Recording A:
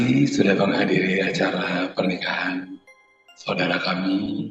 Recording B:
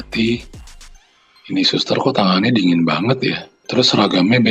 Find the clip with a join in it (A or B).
B